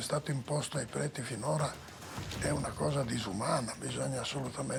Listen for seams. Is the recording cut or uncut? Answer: uncut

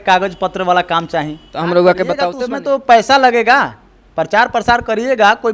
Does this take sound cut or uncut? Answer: cut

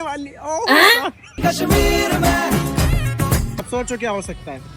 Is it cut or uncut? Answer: cut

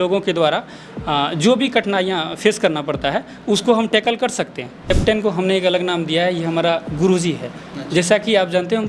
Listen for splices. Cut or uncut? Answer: cut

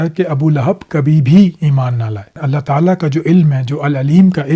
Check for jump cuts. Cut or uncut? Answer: cut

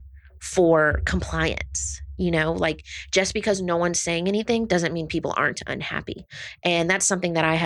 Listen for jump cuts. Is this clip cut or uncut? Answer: uncut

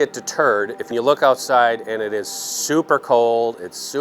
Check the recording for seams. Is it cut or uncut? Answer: cut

